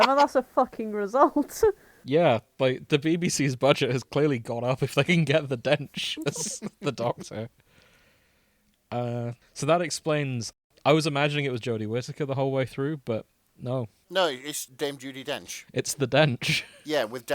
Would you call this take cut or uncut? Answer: cut